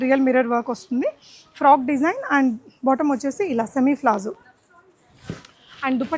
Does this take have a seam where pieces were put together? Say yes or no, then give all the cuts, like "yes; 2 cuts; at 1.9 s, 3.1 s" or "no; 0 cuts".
no; 0 cuts